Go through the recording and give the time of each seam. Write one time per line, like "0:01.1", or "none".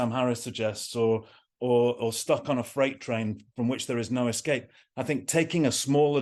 none